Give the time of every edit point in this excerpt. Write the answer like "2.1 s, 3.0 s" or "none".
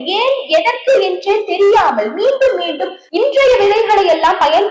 3.0 s